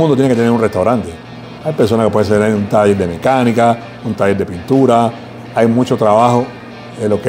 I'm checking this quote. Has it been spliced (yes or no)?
no